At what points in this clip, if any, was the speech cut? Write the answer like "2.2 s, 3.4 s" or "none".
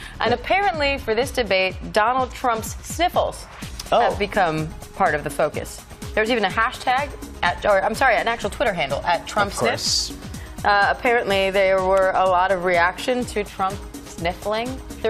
none